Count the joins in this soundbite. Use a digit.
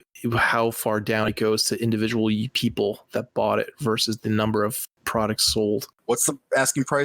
1